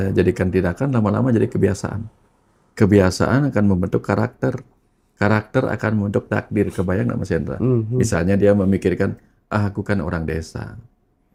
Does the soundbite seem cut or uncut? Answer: uncut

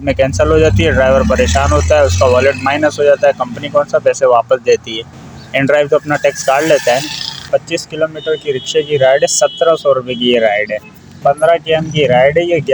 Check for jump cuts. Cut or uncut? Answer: cut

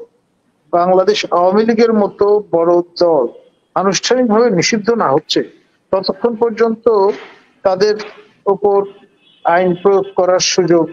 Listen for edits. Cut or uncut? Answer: uncut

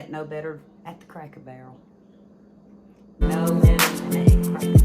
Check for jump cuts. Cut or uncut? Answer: cut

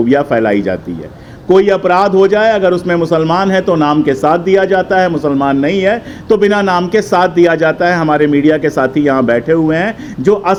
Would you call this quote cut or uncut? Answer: uncut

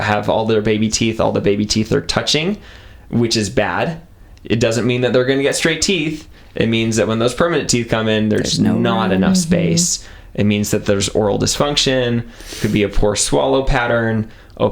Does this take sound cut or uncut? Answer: uncut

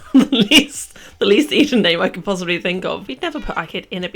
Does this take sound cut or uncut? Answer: cut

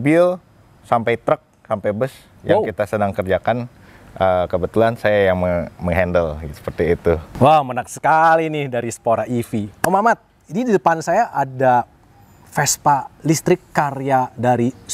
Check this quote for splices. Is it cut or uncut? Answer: uncut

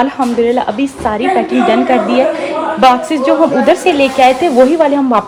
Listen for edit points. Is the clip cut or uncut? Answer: uncut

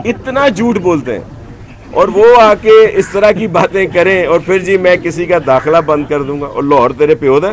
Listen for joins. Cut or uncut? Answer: uncut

